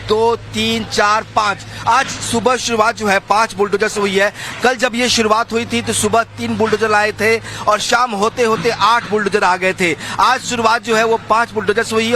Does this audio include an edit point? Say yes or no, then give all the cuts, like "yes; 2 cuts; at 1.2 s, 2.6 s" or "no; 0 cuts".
yes; 1 cut; at 2.2 s